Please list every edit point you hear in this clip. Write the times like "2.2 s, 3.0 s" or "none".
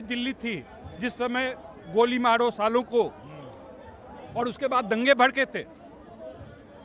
none